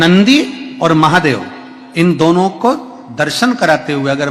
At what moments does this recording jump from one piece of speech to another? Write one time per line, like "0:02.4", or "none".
none

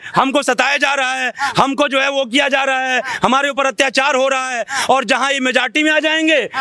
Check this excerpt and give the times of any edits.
none

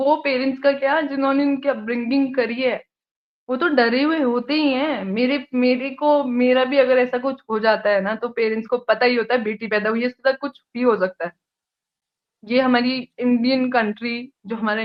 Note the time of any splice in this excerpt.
none

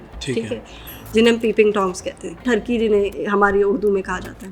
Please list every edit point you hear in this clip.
0:02.4

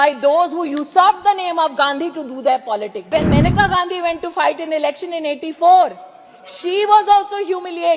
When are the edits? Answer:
0:03.1

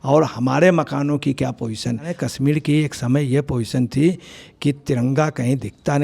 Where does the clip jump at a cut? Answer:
0:02.1

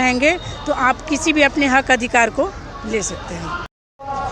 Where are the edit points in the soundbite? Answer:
none

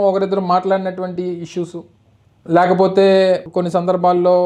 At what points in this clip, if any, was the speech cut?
none

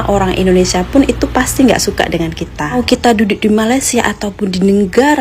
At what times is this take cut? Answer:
0:02.8

